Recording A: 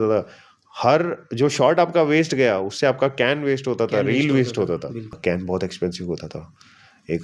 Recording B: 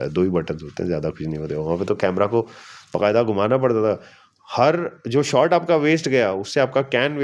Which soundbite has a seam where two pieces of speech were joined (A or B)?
A